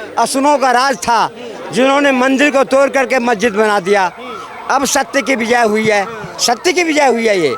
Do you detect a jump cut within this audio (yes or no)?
no